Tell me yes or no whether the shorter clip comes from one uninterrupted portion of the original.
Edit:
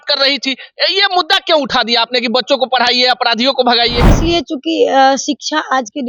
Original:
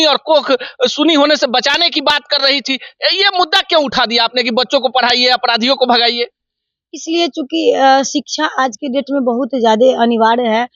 no